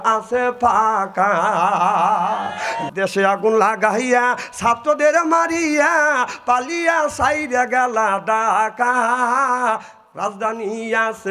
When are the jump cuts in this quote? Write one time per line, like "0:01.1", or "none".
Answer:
0:02.8